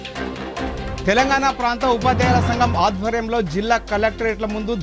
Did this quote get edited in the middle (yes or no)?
yes